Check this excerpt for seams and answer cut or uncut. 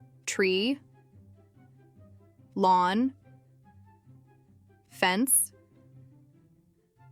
uncut